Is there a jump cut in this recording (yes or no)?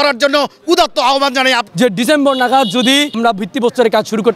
yes